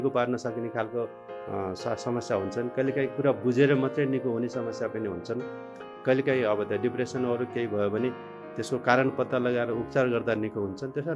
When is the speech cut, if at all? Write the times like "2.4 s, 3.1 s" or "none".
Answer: none